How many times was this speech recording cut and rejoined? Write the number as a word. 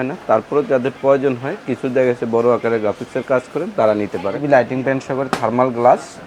one